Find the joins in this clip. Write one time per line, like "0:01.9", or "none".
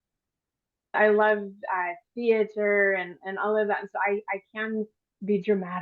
0:01.0